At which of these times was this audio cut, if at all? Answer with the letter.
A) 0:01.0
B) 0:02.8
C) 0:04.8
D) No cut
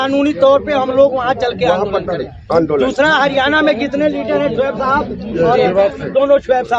D